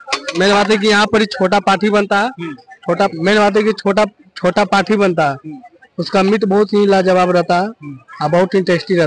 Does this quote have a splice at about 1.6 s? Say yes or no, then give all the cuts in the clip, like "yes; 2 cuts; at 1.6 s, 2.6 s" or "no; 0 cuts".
no; 0 cuts